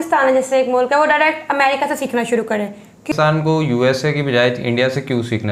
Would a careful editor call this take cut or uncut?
cut